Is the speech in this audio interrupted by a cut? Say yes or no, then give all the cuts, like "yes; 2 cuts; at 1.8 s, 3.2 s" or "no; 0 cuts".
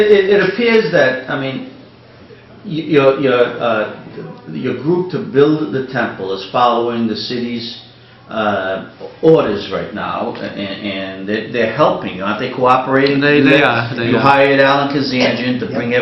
no; 0 cuts